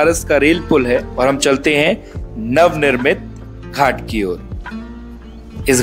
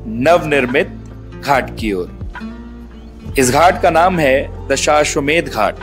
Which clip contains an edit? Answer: first; 1 cut; at 1.1 s

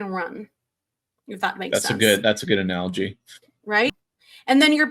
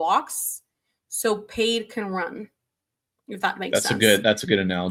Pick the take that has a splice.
first; 1 cut; at 3.9 s

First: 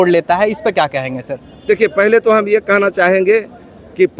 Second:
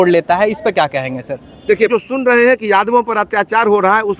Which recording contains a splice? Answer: second; 1 cut; at 1.9 s

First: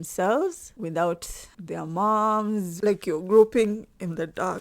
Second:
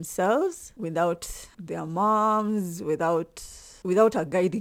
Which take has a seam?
first; 1 cut; at 2.7 s

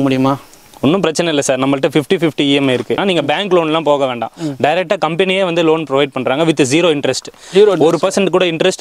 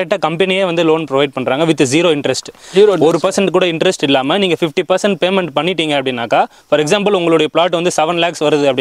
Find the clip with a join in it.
first; 1 cut; at 3.0 s

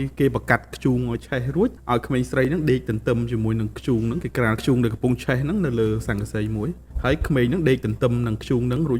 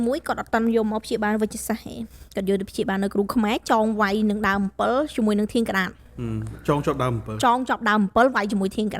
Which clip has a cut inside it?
first; 3 cuts; at 1.8 s, 4.6 s, 6.9 s

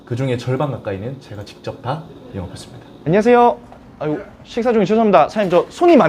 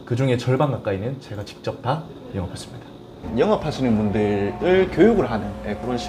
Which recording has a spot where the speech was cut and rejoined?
first; 1 cut; at 3.0 s

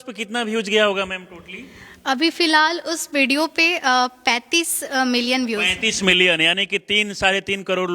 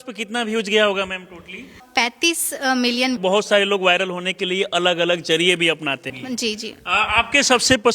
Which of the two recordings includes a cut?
second; 3 cuts; at 1.9 s, 3.2 s, 6.1 s

